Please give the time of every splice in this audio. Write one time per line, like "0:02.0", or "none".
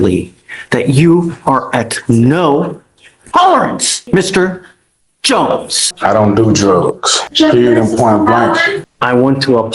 0:03.9
0:05.9
0:07.1
0:08.8

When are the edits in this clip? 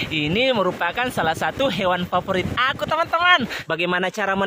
0:03.6

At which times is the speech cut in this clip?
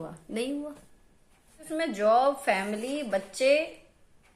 0:01.4

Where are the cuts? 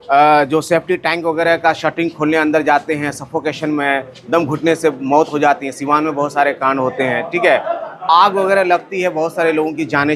none

